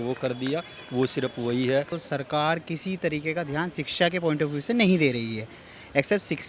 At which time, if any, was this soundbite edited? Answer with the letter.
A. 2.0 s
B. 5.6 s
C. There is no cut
A